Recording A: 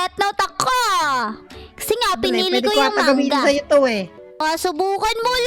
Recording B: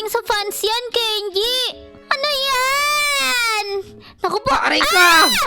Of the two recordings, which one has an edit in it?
B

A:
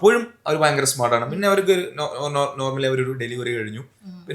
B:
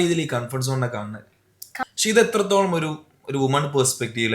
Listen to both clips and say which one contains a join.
B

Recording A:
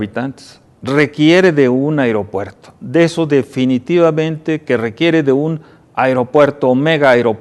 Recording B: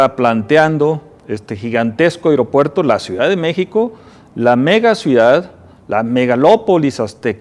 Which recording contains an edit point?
B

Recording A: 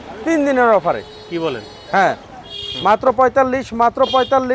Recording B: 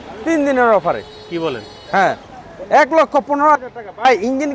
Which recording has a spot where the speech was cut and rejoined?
A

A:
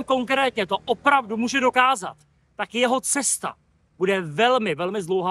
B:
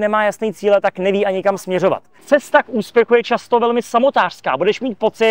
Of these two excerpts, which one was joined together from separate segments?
B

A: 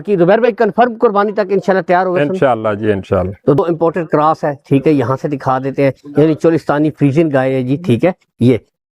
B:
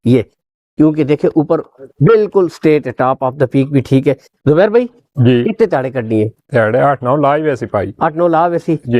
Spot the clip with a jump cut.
A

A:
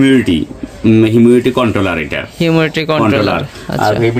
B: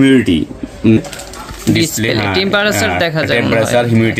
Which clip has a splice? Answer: B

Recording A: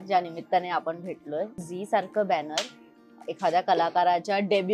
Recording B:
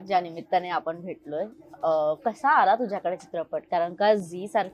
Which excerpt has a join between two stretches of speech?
A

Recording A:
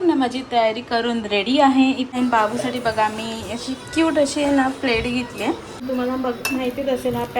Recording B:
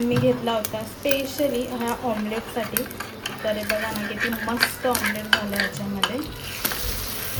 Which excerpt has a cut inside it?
A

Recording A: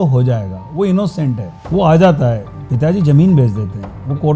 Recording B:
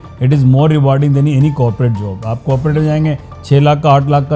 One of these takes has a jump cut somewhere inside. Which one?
A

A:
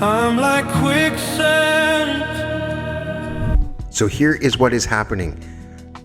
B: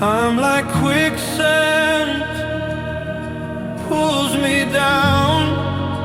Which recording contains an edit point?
A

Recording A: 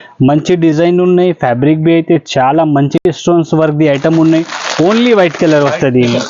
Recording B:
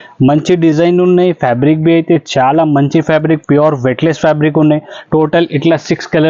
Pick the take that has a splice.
A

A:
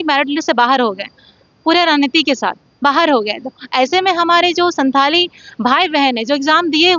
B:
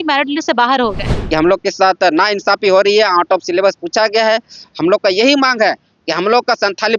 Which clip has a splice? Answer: B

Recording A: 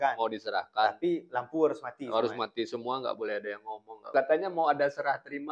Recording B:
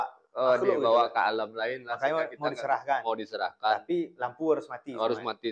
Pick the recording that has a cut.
A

